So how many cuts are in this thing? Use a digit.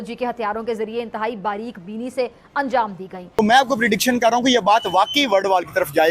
1